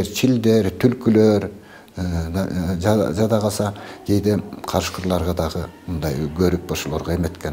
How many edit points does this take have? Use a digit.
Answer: 0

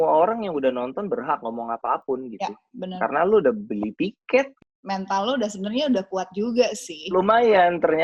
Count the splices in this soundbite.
1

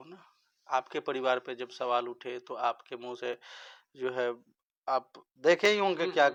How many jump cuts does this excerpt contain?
0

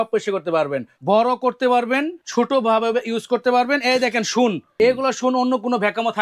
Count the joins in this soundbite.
3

